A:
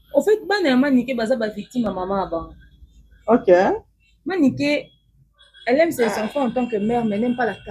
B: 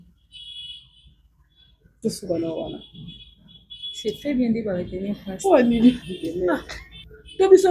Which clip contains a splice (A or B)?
B